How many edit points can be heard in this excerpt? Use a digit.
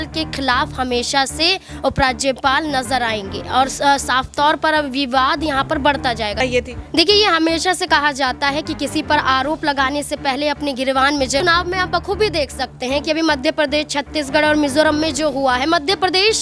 2